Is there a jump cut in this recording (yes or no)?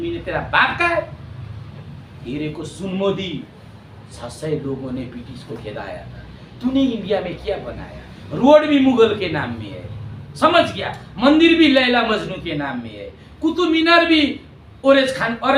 no